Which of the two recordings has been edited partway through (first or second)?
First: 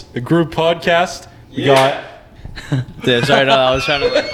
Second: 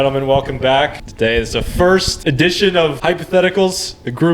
second